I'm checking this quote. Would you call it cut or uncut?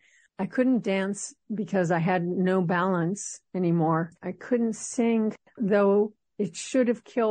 cut